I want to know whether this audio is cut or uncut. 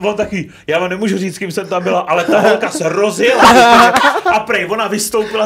uncut